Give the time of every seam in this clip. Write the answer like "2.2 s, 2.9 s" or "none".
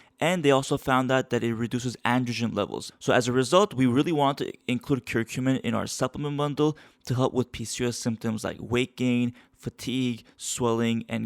2.8 s